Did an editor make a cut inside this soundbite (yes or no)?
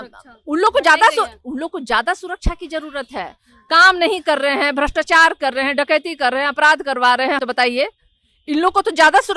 yes